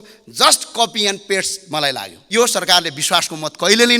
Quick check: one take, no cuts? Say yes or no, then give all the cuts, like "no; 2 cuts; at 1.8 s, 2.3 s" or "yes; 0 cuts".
no; 1 cut; at 2.2 s